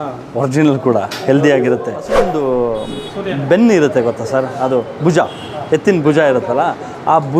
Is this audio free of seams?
no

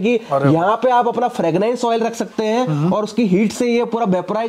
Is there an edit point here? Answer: no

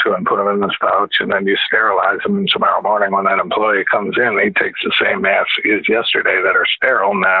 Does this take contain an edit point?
no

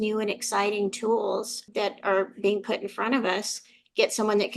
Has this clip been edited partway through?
yes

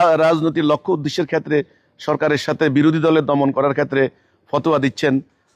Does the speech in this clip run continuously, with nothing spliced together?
yes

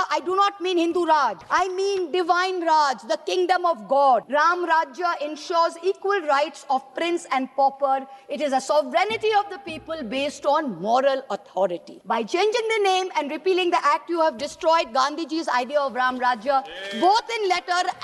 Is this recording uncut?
no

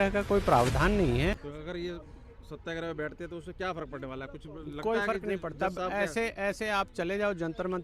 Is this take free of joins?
no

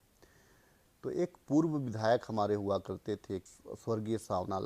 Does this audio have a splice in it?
yes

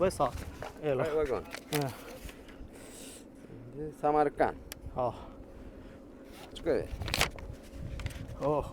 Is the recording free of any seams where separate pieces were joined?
yes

